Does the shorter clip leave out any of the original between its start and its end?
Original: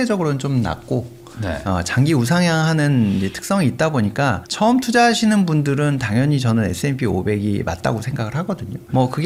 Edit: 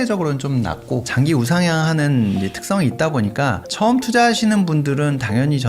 yes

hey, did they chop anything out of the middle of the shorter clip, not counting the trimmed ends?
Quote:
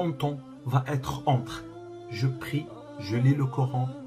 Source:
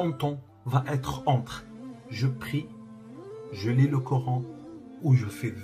yes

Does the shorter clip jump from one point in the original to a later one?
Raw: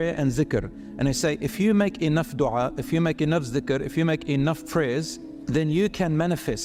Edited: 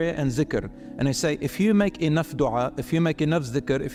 no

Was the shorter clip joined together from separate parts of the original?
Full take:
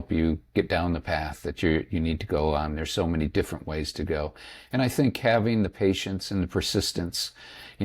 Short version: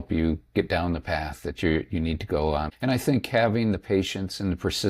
yes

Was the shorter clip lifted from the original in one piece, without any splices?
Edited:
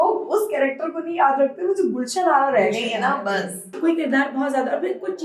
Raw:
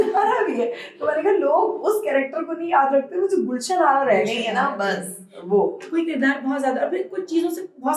no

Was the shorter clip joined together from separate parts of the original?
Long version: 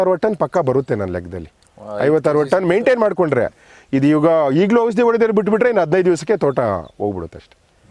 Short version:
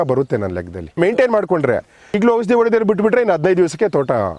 yes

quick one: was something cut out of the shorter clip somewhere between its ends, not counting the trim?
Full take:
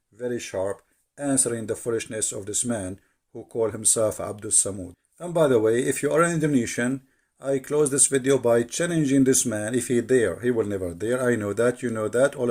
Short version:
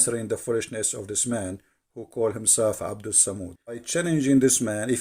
yes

